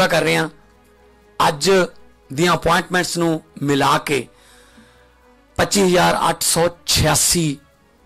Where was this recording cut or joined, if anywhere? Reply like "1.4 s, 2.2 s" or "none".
none